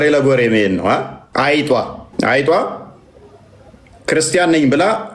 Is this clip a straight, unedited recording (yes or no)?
no